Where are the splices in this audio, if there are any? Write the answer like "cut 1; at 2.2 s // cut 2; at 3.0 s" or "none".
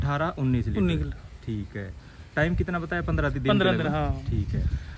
none